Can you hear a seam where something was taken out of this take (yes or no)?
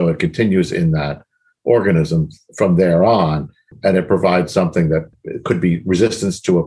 yes